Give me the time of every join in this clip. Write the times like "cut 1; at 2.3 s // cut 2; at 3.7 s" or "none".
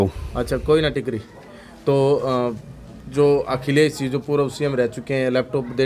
none